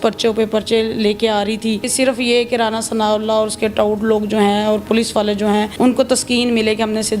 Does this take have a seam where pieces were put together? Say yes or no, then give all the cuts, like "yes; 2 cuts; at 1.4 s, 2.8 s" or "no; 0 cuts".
yes; 2 cuts; at 1.9 s, 5.7 s